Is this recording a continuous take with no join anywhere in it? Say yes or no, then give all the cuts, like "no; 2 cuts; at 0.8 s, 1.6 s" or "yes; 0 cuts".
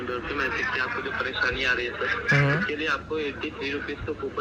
yes; 0 cuts